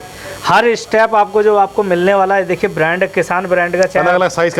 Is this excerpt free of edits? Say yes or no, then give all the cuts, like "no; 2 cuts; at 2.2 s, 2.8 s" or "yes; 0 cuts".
yes; 0 cuts